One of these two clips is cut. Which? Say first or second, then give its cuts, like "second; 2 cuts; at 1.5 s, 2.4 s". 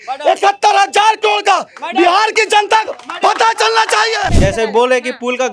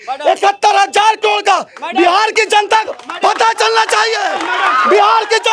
first; 1 cut; at 4.3 s